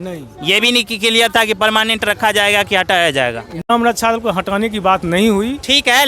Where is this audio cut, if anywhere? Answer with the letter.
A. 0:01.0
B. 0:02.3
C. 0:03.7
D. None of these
C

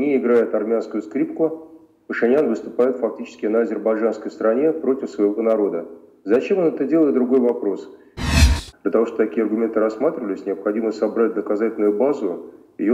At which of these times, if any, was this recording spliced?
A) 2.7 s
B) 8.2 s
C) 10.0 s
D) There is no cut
B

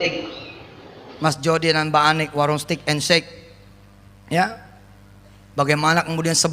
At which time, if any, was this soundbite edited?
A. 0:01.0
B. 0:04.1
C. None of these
A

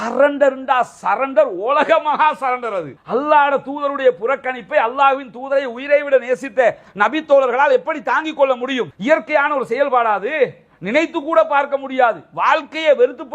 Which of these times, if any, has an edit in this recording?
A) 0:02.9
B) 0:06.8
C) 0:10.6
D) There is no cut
A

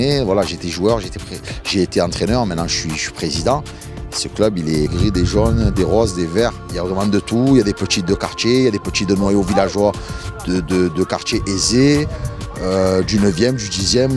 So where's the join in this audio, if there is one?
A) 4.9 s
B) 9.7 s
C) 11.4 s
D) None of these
D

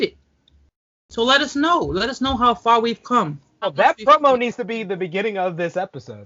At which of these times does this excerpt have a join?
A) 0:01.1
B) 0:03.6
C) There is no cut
B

